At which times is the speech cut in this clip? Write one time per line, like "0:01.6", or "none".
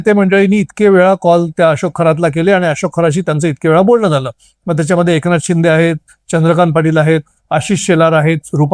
none